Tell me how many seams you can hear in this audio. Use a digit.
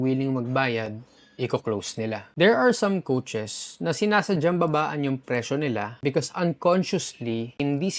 1